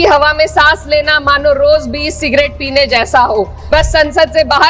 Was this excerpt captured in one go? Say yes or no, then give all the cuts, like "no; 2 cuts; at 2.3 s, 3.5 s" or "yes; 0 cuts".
no; 1 cut; at 3.6 s